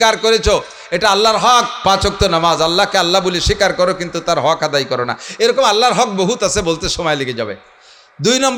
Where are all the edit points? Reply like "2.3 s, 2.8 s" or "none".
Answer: none